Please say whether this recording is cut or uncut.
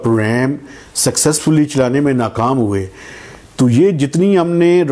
uncut